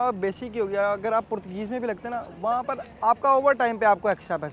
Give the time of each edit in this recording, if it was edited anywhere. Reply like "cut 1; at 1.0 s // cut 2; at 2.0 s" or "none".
none